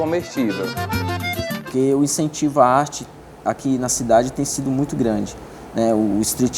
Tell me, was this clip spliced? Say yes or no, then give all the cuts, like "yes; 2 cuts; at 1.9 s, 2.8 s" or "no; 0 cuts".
yes; 1 cut; at 1.6 s